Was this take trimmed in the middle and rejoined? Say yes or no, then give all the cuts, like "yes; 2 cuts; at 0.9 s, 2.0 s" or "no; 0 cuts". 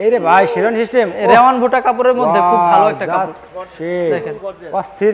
no; 0 cuts